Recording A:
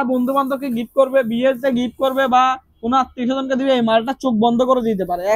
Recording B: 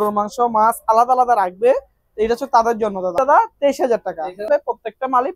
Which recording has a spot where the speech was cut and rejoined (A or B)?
B